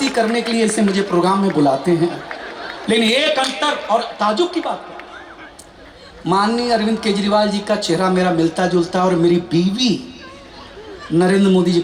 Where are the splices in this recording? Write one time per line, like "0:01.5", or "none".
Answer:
none